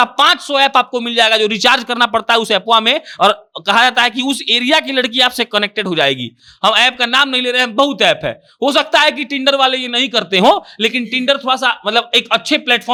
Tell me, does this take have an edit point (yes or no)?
no